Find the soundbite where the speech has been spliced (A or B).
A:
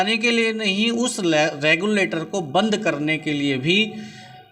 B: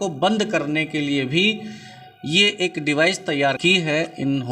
B